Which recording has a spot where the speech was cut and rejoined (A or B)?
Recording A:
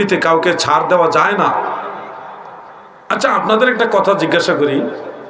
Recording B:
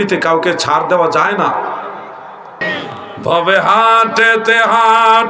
B